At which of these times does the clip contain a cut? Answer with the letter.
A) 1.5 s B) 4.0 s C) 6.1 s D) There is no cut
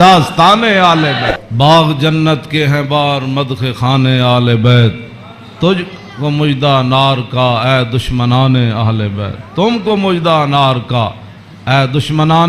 A